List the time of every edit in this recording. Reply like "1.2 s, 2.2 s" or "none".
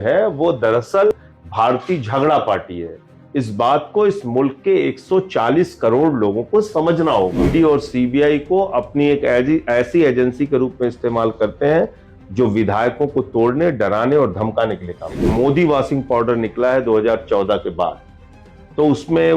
1.1 s, 7.5 s, 15.3 s